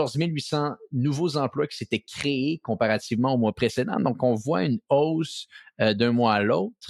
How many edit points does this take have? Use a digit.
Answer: 0